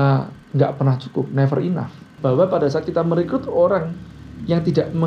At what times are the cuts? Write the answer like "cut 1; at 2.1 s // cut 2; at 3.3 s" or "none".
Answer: cut 1; at 2.1 s